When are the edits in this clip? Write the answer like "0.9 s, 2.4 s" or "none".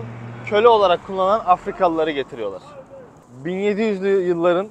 none